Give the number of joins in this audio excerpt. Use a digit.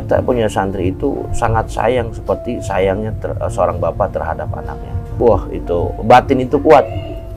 1